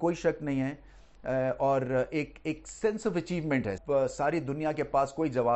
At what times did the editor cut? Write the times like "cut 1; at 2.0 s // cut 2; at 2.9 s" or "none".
cut 1; at 3.8 s